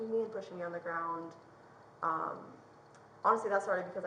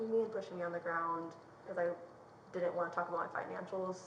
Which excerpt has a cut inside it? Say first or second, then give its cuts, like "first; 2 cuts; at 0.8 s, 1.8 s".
second; 1 cut; at 1.7 s